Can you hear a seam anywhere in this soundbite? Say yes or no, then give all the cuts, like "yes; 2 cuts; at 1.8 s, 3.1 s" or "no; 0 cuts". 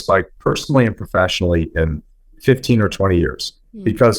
no; 0 cuts